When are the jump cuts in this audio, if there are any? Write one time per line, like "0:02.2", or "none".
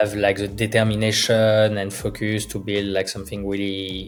none